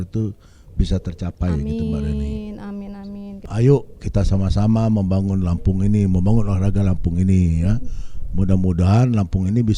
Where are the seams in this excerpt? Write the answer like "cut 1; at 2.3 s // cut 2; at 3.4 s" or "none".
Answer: cut 1; at 3.4 s